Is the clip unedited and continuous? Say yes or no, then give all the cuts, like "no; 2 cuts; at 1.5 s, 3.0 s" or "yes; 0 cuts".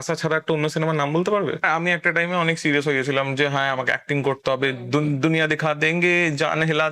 no; 1 cut; at 1.6 s